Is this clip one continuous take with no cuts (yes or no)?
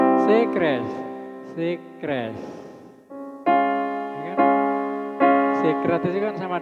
yes